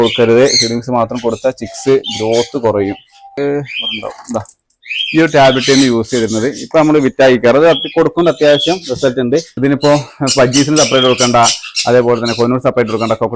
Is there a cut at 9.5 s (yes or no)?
yes